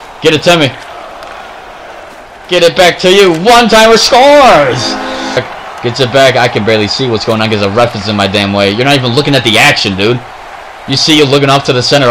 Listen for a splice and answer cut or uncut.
cut